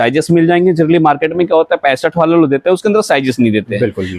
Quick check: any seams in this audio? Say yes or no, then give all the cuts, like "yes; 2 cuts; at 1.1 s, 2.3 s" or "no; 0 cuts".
no; 0 cuts